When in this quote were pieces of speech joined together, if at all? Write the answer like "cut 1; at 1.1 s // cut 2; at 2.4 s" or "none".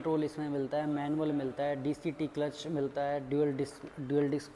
none

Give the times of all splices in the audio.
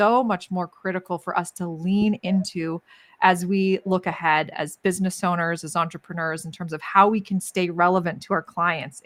none

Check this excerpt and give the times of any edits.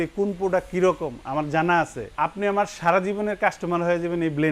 cut 1; at 2.1 s

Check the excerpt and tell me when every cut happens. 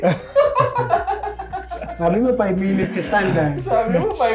none

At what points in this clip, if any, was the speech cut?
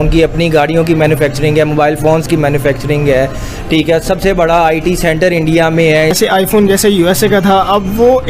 cut 1; at 6.2 s

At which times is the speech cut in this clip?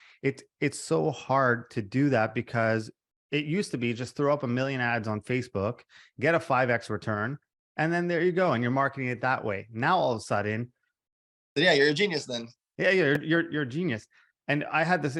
none

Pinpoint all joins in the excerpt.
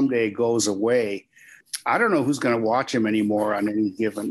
cut 1; at 1.6 s

